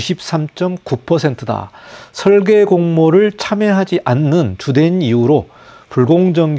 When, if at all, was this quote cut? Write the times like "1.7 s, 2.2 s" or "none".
none